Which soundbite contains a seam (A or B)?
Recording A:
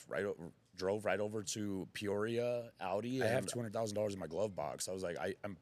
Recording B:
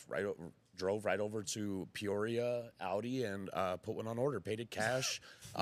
A